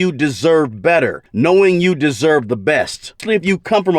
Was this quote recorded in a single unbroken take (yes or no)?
no